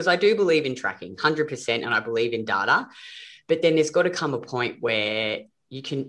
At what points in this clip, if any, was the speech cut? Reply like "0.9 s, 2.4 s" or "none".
none